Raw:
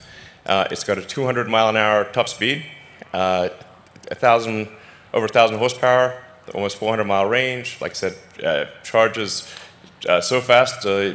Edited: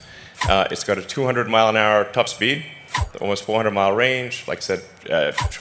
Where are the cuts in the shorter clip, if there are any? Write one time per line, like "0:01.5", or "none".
0:03.0